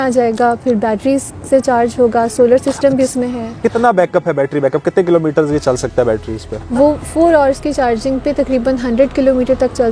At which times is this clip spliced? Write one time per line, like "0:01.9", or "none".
0:03.5
0:06.6